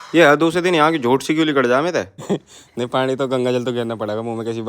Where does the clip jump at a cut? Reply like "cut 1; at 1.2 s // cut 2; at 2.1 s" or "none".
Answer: cut 1; at 2.2 s